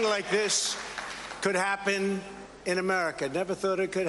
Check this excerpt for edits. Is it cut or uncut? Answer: uncut